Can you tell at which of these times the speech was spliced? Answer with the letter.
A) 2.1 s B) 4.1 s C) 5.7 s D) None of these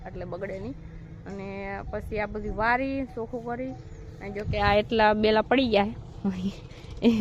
D